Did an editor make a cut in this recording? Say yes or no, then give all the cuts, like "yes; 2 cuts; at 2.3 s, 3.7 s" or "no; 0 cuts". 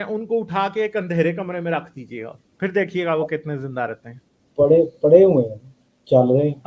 no; 0 cuts